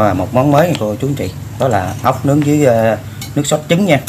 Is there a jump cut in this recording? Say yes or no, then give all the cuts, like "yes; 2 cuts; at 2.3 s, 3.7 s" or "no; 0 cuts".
no; 0 cuts